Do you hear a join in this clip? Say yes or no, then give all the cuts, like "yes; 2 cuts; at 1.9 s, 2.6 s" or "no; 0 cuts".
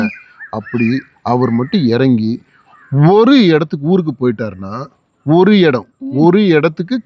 no; 0 cuts